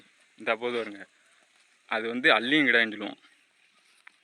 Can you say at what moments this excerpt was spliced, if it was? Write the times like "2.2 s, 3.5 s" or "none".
none